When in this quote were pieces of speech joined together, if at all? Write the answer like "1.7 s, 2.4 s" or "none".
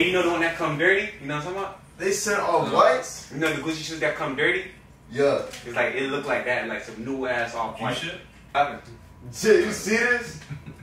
8.3 s